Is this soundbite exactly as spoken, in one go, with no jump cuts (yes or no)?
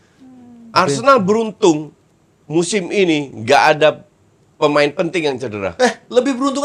yes